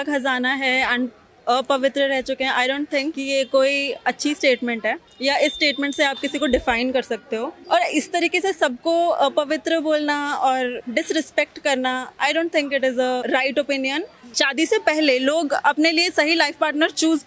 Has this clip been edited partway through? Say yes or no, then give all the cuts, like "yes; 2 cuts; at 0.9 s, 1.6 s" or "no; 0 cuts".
yes; 6 cuts; at 3.2 s, 5.1 s, 7.5 s, 10.8 s, 13.2 s, 14.2 s